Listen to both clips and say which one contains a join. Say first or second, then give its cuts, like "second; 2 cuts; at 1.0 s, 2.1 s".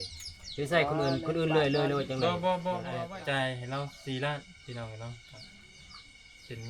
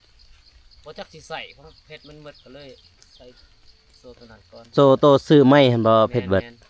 first; 1 cut; at 3.0 s